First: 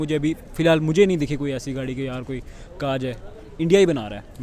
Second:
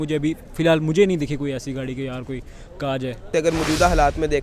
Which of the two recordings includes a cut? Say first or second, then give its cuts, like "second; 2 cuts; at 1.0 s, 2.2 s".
second; 1 cut; at 3.3 s